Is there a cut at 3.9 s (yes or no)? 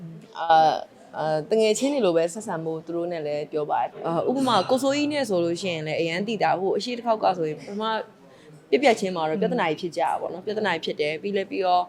yes